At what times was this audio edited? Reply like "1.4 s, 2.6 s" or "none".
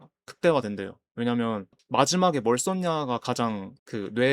1.8 s